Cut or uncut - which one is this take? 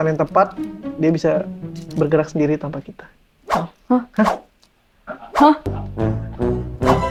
uncut